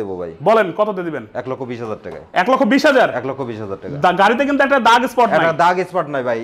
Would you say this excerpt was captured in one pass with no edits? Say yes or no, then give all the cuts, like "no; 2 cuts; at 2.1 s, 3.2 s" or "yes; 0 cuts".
yes; 0 cuts